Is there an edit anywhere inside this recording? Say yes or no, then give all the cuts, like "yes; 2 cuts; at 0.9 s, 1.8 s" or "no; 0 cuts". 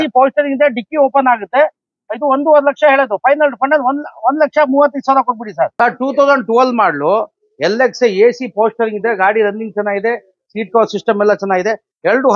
yes; 1 cut; at 5.7 s